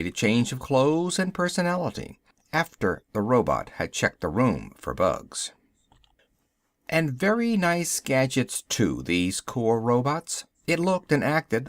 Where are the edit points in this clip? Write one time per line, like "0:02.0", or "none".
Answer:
0:08.6